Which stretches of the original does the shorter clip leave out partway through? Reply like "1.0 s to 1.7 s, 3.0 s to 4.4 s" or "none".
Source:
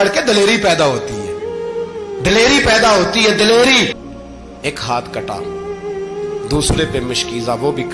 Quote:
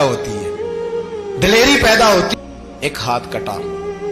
3.1 s to 4.1 s